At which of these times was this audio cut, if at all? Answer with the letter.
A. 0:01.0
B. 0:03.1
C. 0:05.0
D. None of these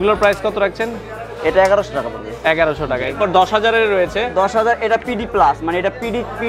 B